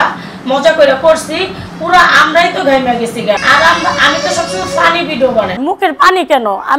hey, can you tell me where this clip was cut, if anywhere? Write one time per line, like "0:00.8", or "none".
0:03.4
0:05.6